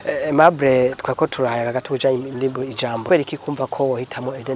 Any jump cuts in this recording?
yes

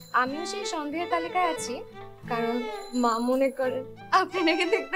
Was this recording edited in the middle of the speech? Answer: no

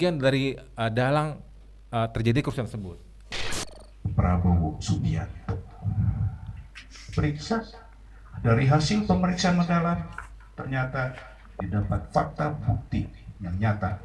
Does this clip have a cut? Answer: yes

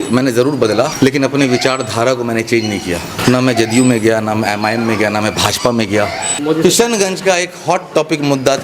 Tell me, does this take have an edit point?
yes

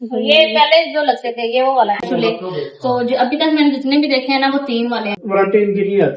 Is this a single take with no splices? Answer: no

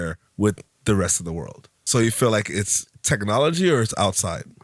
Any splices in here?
yes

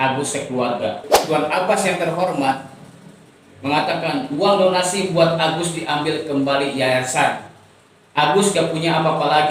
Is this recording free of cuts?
no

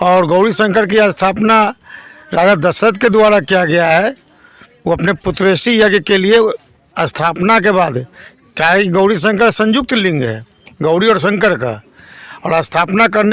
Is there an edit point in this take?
no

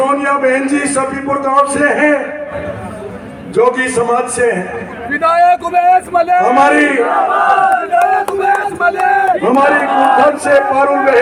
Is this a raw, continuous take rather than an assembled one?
yes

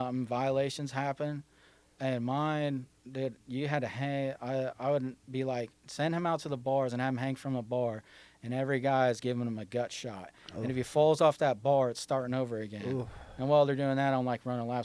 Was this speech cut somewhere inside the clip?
no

